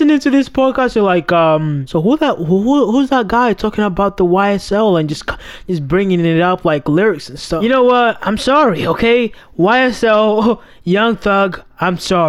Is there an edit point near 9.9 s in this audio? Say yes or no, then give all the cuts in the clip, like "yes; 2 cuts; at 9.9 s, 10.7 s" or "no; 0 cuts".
no; 2 cuts; at 1.8 s, 7.6 s